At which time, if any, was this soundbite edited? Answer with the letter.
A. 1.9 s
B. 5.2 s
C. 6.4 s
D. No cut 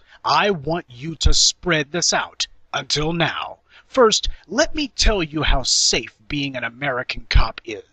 D